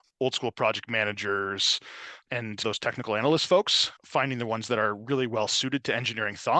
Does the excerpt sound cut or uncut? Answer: uncut